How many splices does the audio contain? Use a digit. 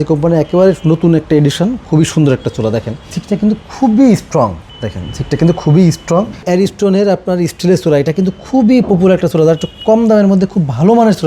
3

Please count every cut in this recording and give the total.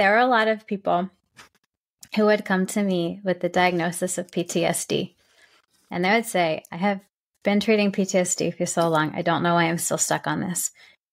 0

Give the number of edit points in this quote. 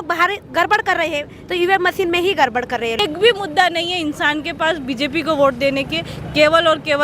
1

